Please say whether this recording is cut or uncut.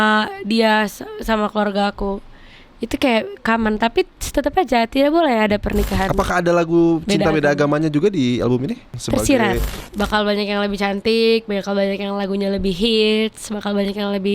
cut